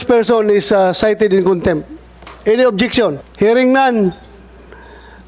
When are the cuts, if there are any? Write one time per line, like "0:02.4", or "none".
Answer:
0:03.2

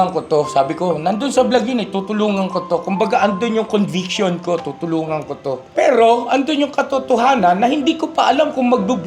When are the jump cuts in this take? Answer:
0:05.6

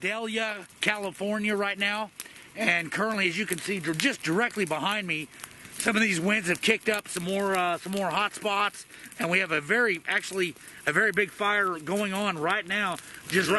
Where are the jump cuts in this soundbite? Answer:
none

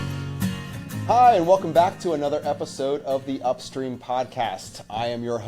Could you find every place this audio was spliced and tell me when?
0:01.1

